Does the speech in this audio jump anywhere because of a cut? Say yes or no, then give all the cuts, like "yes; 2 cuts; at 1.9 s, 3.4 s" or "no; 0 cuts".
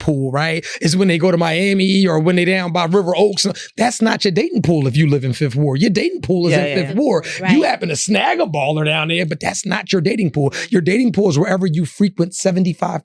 no; 0 cuts